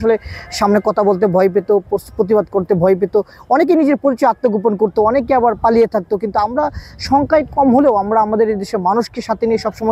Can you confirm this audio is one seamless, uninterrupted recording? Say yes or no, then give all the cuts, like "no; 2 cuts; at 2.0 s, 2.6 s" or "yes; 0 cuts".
yes; 0 cuts